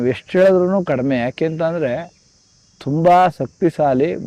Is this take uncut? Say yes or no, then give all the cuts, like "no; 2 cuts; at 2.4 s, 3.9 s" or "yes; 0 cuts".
yes; 0 cuts